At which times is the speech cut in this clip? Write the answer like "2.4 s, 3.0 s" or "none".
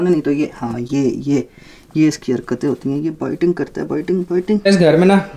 none